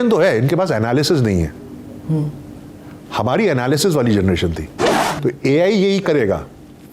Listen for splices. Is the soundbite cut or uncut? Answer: cut